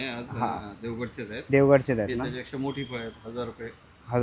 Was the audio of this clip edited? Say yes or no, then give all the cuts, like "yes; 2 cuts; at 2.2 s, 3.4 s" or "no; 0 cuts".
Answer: no; 0 cuts